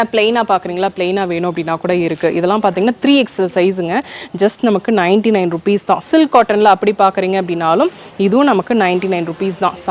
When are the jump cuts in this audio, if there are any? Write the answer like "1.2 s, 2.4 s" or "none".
6.1 s